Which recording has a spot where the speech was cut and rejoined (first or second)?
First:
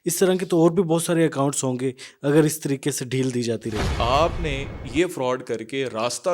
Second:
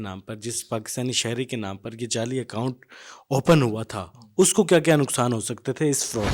first